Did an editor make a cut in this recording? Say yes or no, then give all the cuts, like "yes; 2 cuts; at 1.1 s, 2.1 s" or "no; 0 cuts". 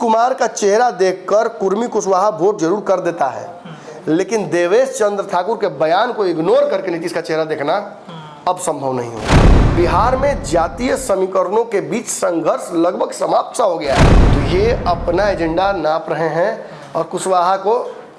yes; 2 cuts; at 9.6 s, 14.2 s